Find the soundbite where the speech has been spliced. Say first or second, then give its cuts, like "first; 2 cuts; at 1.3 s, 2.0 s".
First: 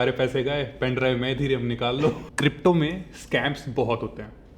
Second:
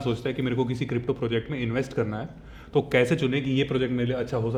first; 1 cut; at 2.3 s